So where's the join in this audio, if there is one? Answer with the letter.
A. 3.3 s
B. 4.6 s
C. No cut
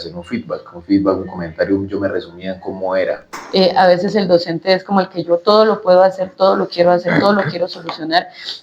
A